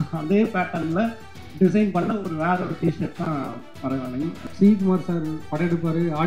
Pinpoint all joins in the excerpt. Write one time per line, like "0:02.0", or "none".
0:04.4